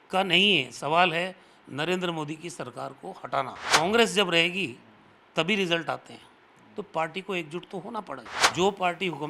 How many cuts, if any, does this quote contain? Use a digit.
2